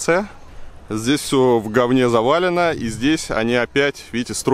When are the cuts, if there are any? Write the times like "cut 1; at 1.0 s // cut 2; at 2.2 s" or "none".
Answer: none